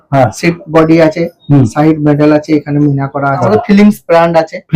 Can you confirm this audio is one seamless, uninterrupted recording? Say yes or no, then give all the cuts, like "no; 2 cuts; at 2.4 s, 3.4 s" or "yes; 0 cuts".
no; 1 cut; at 3.4 s